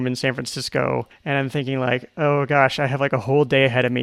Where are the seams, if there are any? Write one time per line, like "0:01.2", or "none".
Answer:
0:01.1